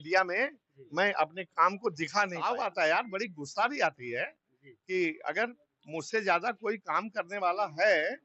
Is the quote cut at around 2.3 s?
yes; 1 cut; at 2.3 s

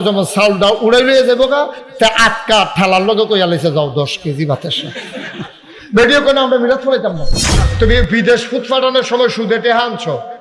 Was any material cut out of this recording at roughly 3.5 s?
no; 1 cut; at 7.6 s

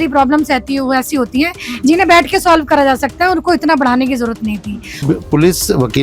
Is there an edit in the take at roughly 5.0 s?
yes; 1 cut; at 5.0 s

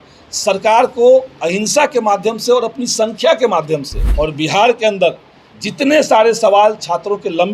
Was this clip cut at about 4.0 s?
yes; 1 cut; at 4.0 s

